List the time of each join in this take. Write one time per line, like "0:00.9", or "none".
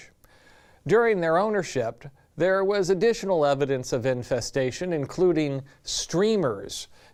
none